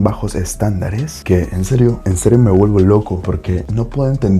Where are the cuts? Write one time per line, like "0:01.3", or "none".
0:01.1
0:02.1
0:03.2